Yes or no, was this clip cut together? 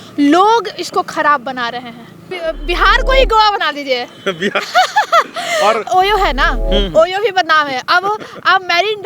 yes